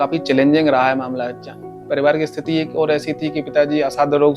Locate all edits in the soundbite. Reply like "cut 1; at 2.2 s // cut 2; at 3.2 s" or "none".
cut 1; at 1.8 s